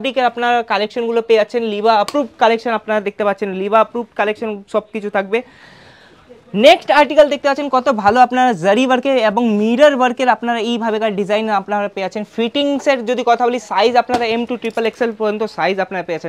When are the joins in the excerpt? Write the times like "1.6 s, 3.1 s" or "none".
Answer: none

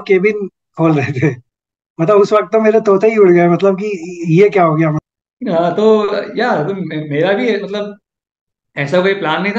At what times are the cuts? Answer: 5.0 s

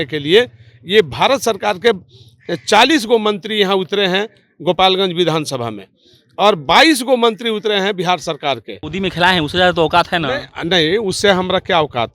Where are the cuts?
8.8 s

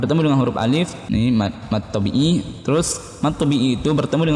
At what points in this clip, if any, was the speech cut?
1.0 s

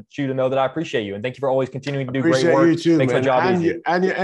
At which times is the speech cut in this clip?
none

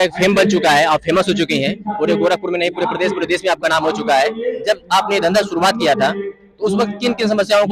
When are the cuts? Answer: none

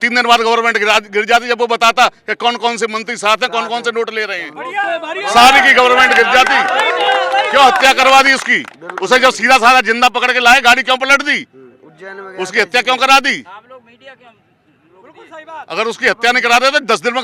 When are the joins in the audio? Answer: none

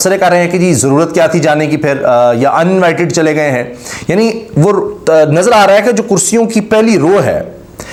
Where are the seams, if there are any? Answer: none

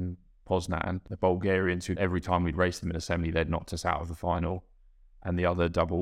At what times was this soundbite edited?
1.1 s, 2.0 s

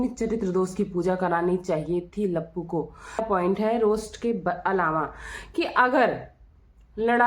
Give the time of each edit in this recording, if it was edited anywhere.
3.3 s

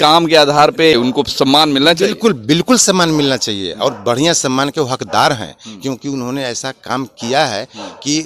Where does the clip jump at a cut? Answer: 0.9 s

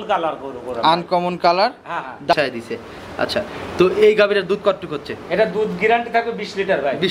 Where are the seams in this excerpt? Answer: 2.3 s

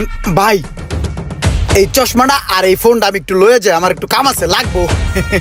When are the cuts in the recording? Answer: none

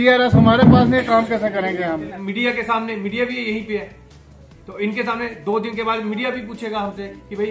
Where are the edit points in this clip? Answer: 2.1 s

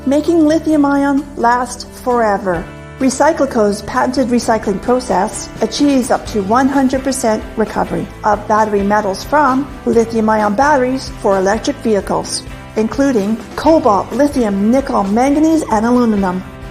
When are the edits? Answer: 1.7 s

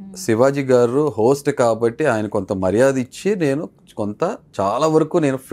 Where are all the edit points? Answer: none

